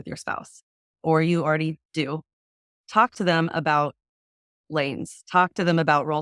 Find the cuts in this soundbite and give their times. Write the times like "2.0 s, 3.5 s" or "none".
2.7 s